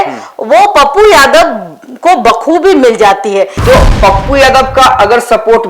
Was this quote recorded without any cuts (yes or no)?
no